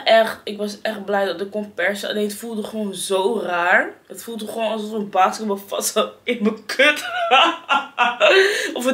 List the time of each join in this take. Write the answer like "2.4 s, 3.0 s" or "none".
none